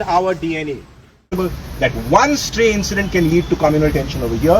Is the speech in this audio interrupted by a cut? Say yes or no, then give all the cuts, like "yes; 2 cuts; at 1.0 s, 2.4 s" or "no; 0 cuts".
yes; 1 cut; at 1.3 s